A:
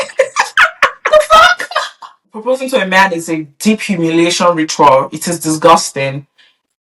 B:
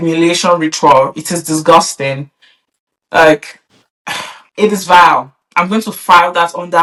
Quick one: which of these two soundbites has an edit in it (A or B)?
A